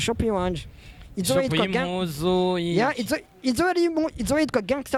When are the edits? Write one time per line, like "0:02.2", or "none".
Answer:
none